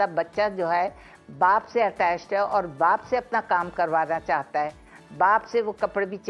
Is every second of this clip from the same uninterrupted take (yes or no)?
yes